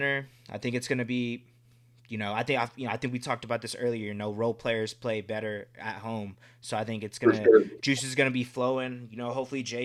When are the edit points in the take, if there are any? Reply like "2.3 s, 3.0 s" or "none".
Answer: none